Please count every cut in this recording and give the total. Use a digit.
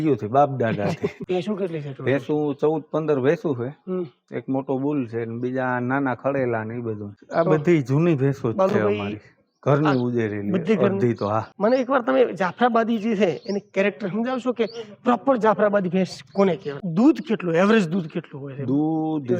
4